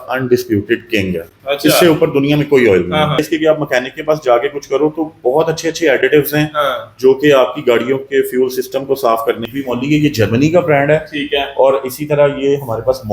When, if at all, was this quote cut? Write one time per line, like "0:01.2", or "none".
0:03.2
0:09.4

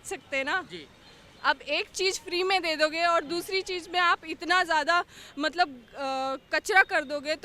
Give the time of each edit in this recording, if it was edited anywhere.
none

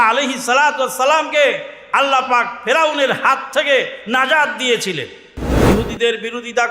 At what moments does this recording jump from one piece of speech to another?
0:05.5

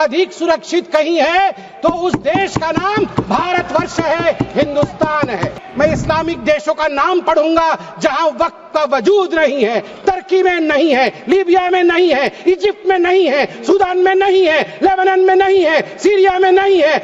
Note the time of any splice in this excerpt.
0:05.6

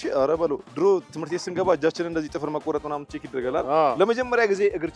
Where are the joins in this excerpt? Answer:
none

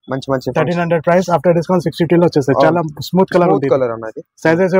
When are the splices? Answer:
none

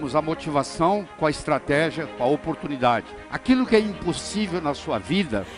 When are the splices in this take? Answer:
0:03.1

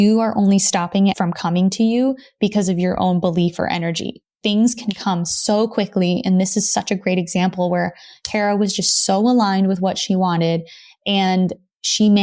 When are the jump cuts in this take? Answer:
0:01.2

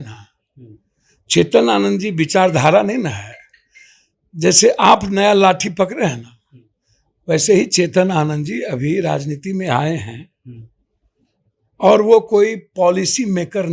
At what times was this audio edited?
none

